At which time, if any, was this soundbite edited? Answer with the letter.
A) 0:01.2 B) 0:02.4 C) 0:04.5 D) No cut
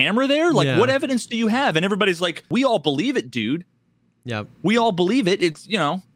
B